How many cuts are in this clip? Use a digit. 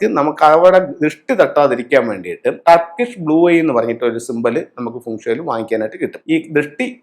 2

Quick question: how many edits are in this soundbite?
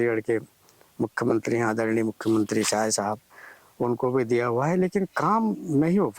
1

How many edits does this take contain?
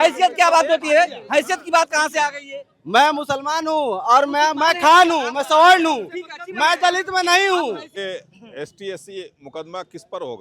1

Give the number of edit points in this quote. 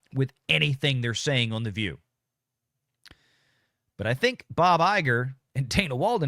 0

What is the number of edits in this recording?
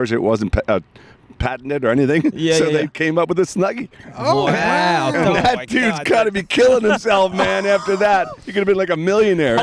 0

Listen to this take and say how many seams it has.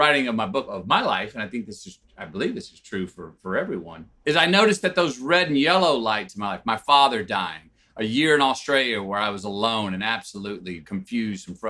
0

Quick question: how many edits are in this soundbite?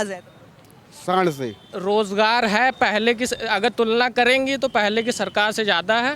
1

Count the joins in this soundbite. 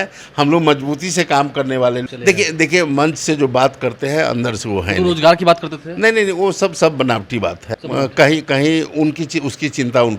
2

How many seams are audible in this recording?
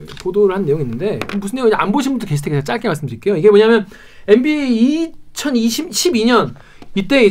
0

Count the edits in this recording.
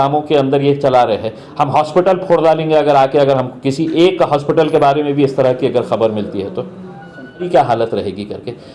1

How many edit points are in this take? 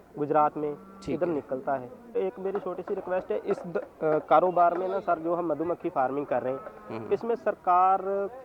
1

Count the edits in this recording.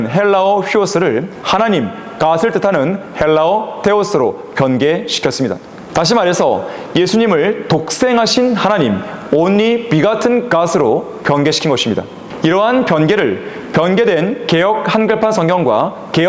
3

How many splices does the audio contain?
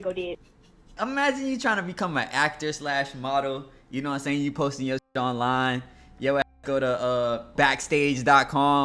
2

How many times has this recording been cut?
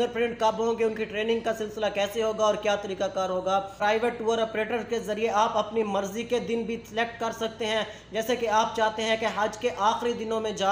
1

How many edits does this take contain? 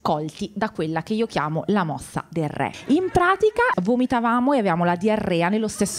2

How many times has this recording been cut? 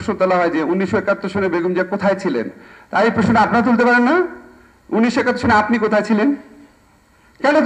0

